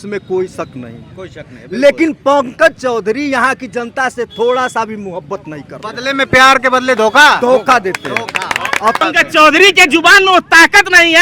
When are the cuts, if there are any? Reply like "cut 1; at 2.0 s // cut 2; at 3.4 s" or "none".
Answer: cut 1; at 9.0 s